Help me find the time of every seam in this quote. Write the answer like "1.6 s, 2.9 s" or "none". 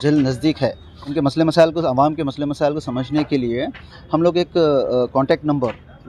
1.1 s